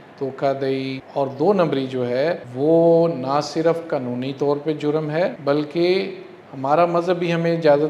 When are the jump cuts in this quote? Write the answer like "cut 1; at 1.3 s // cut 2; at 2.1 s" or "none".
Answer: cut 1; at 1.0 s // cut 2; at 2.5 s // cut 3; at 5.4 s